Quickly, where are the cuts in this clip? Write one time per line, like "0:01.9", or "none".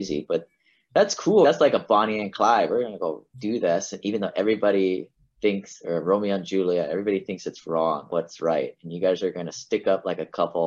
none

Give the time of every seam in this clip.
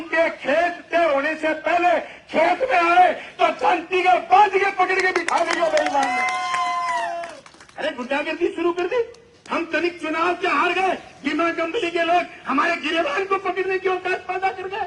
none

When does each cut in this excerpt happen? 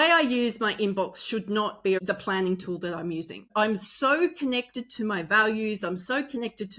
0:02.0
0:03.5

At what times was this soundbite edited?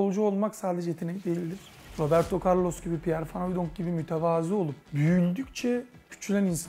none

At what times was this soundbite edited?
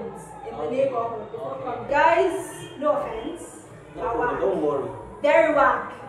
0:01.9

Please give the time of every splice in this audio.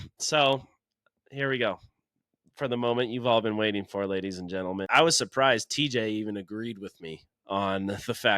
0:04.8

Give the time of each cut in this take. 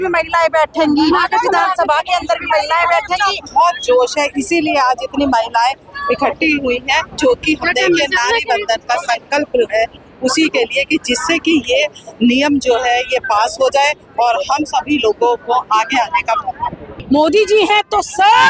0:03.5
0:17.0

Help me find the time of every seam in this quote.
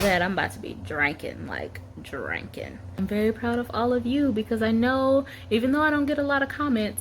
0:03.0

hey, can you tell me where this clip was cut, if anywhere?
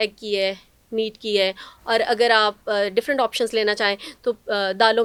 none

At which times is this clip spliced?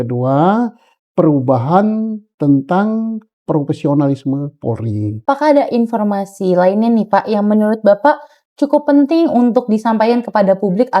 0:05.2

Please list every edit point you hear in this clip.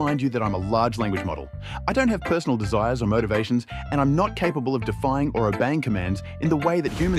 none

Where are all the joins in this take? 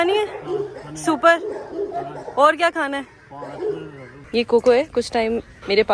0:04.1

